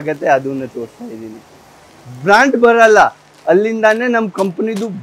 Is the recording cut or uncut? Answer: uncut